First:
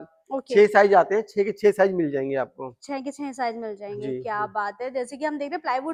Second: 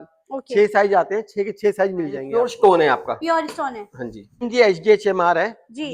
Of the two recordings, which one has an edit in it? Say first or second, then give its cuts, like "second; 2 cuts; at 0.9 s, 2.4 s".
second; 2 cuts; at 2.3 s, 4.4 s